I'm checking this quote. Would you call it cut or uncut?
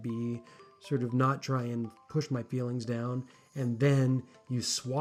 uncut